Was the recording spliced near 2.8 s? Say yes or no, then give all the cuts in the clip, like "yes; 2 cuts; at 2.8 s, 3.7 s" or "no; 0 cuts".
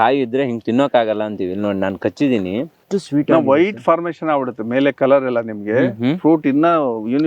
yes; 1 cut; at 2.8 s